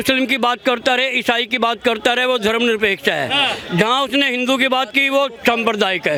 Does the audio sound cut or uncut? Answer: uncut